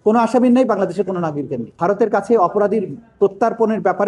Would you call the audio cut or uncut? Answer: cut